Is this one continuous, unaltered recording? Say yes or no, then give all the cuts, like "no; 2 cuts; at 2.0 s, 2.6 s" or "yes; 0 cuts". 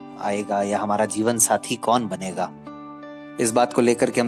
yes; 0 cuts